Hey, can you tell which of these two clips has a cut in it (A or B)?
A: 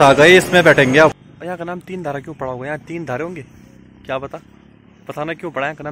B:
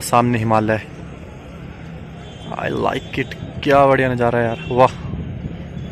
A